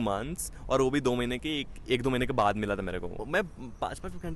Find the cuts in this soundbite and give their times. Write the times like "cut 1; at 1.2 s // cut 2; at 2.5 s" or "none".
cut 1; at 3.2 s